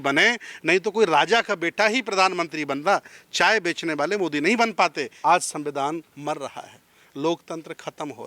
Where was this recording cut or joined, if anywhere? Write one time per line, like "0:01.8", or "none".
0:05.1